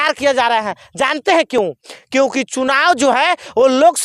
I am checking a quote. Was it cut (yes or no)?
no